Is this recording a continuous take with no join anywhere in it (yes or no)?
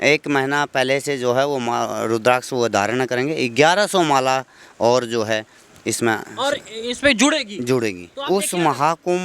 no